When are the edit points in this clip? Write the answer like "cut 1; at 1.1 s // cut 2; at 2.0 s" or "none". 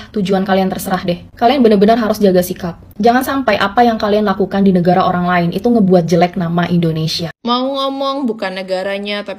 cut 1; at 7.3 s